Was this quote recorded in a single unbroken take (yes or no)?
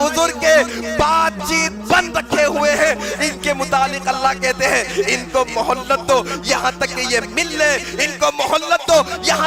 yes